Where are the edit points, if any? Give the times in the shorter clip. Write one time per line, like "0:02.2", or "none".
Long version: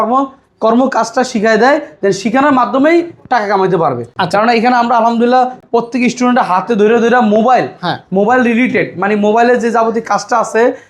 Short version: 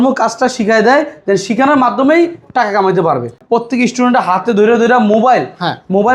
0:03.4